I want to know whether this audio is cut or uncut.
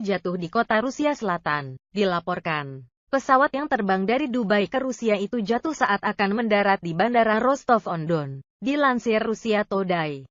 uncut